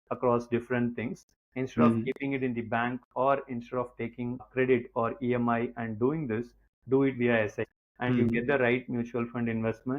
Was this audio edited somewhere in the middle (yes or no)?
yes